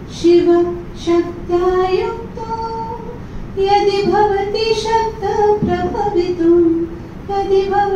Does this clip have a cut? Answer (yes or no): no